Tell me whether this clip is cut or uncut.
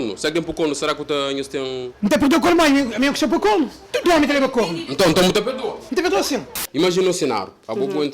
cut